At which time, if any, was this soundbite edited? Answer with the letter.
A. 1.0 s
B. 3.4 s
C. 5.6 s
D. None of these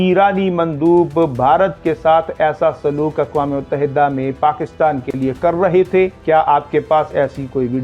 D